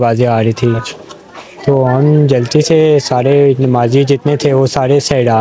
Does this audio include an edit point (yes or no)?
no